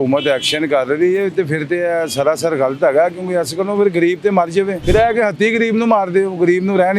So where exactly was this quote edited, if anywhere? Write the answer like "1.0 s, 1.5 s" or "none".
4.8 s

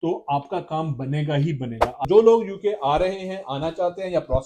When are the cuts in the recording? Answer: 2.1 s

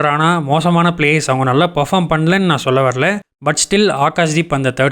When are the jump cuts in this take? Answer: 3.2 s

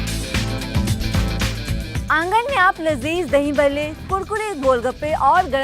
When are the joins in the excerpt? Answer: 1.9 s

